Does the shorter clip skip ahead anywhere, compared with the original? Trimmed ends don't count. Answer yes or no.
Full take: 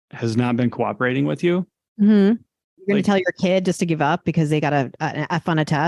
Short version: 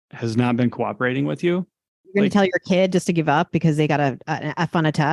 yes